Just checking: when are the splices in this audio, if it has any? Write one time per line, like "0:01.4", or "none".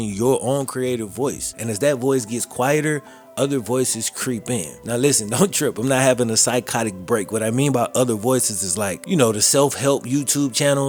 none